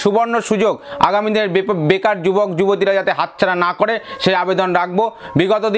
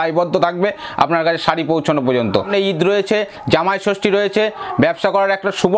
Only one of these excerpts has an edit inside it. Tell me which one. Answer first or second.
second